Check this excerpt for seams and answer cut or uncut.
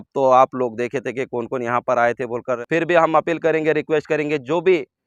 cut